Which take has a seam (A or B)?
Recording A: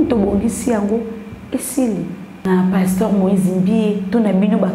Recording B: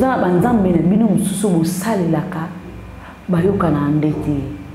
A